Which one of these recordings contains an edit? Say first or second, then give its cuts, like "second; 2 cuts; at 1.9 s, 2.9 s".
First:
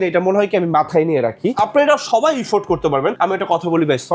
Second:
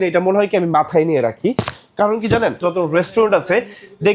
first; 2 cuts; at 1.5 s, 3.2 s